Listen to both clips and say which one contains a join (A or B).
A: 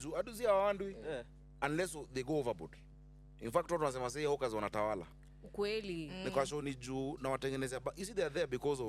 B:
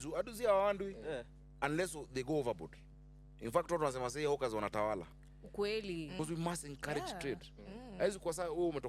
B